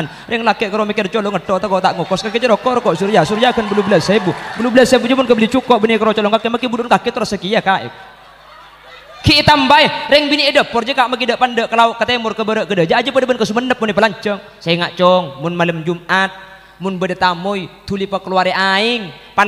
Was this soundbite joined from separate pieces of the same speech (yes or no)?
yes